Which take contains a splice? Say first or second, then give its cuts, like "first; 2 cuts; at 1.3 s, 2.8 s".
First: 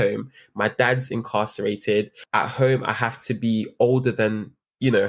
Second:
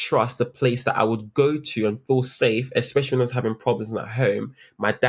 first; 1 cut; at 2.2 s